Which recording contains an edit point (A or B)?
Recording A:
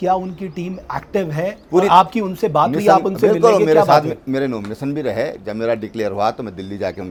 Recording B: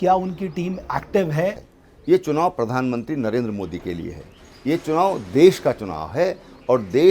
B